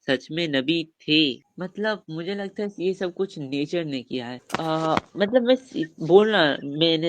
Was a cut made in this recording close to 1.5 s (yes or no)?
yes